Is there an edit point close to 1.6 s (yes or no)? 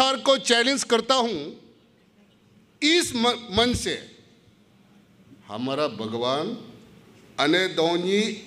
no